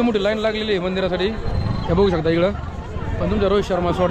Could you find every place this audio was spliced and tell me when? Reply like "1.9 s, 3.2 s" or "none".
none